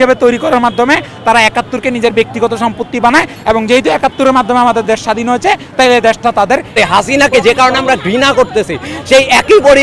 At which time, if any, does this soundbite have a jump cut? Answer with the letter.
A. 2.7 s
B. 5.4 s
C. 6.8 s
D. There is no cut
C